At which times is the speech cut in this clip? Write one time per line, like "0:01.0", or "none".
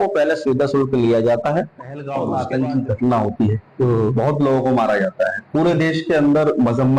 0:02.2